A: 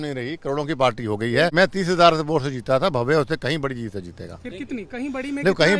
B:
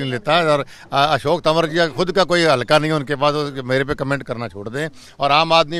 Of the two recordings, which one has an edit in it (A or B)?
A